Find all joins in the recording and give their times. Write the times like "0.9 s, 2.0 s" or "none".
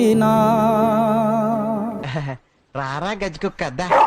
2.0 s